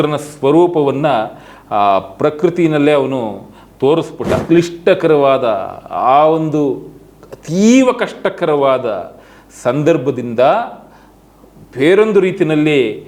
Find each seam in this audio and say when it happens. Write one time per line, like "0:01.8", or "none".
0:04.3